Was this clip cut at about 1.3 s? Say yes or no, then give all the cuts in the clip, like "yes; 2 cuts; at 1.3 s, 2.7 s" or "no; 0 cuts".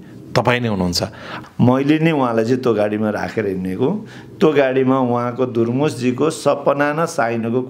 yes; 1 cut; at 1.3 s